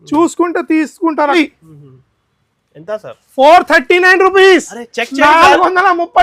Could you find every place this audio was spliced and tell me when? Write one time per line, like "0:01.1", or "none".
0:01.3